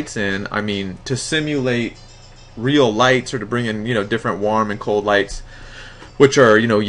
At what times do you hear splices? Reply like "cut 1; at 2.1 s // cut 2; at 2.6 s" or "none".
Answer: cut 1; at 5.4 s